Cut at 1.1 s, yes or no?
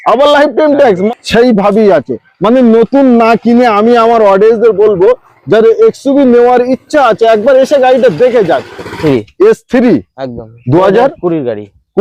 yes